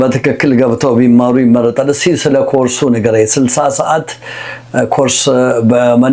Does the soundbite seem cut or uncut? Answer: uncut